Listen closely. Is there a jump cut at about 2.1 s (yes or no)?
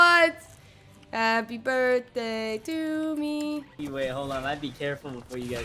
no